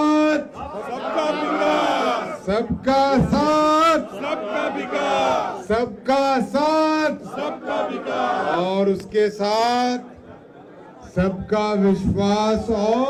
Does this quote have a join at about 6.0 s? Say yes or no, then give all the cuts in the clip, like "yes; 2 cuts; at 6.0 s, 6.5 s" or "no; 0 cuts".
no; 0 cuts